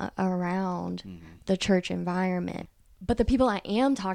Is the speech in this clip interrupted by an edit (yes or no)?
yes